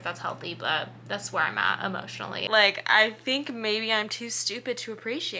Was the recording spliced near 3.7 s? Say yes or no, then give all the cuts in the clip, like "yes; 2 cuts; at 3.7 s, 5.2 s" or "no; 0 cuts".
no; 1 cut; at 2.4 s